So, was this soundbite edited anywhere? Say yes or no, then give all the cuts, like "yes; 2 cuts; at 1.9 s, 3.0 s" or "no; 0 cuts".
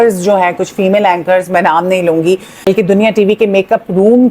yes; 1 cut; at 2.7 s